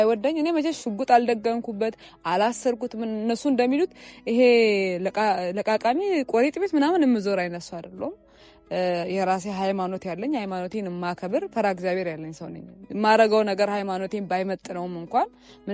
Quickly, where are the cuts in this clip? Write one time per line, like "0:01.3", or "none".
none

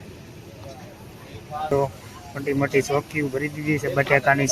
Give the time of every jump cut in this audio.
0:01.7

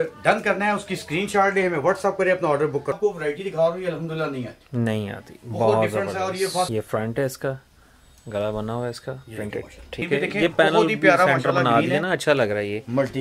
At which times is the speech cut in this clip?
0:03.0
0:06.7
0:10.1

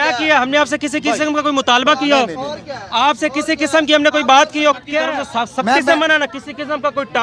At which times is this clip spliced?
0:05.2

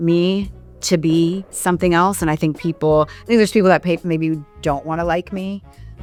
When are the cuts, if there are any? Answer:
none

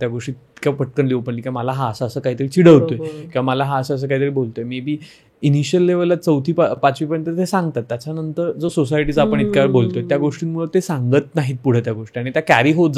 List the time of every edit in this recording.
none

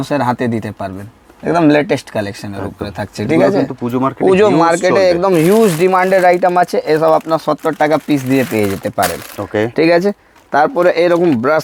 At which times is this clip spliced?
none

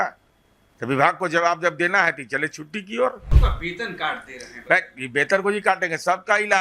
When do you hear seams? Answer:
0:03.3

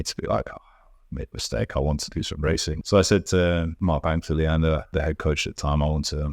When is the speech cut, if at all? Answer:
0:02.7
0:03.7
0:04.9

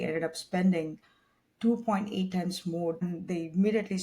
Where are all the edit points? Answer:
0:03.0

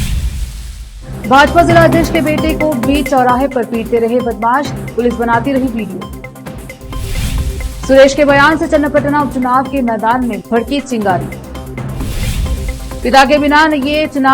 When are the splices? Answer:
0:00.9

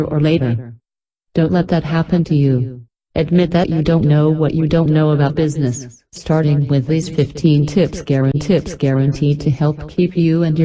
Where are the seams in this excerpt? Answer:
0:08.7

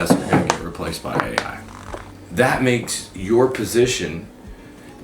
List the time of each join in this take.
0:02.2

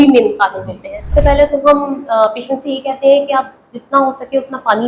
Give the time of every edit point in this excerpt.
0:01.0

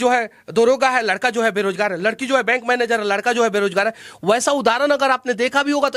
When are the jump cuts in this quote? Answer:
none

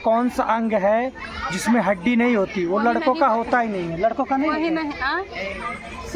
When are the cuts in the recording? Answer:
none

